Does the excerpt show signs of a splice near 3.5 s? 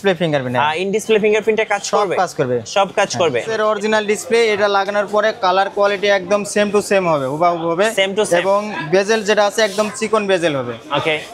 yes; 1 cut; at 3.5 s

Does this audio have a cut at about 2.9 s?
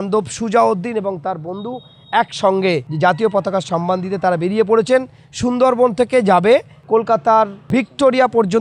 yes; 1 cut; at 2.9 s

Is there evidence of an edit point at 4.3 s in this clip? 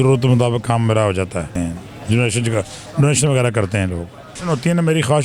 yes; 2 cuts; at 1.5 s, 4.3 s

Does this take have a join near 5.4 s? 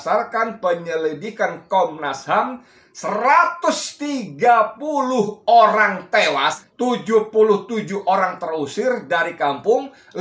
no; 1 cut; at 6.6 s

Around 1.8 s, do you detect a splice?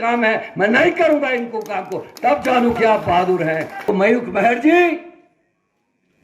no; 1 cut; at 3.9 s

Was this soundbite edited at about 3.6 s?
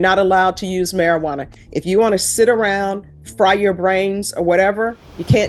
no; 0 cuts

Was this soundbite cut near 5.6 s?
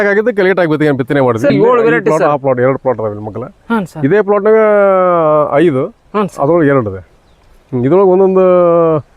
no; 1 cut; at 1.5 s

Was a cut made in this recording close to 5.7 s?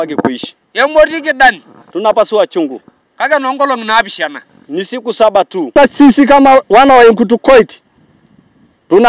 yes; 1 cut; at 5.7 s

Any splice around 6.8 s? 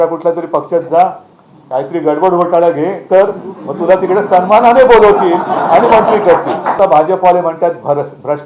yes; 1 cut; at 6.8 s

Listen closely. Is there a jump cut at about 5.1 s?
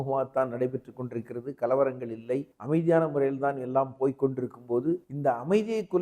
yes; 2 cuts; at 2.5 s, 5.1 s

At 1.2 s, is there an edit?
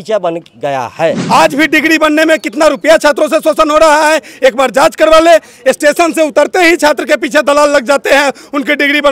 yes; 1 cut; at 1.2 s

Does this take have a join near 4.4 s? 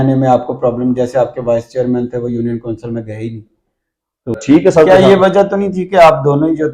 yes; 1 cut; at 4.4 s

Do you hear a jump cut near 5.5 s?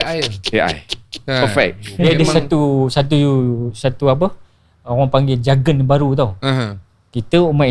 no; 1 cut; at 2.1 s

